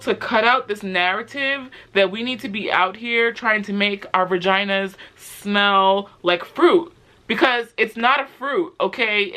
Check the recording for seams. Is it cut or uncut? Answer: uncut